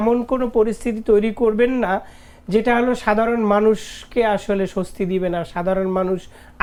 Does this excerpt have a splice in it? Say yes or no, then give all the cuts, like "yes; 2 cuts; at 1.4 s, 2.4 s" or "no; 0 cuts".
no; 0 cuts